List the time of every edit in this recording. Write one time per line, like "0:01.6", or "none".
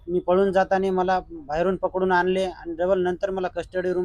none